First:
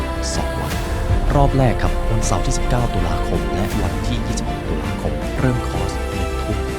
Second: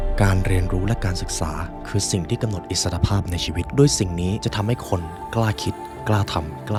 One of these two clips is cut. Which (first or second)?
first